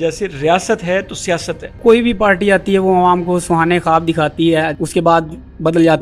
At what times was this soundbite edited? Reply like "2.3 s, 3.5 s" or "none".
1.8 s, 4.7 s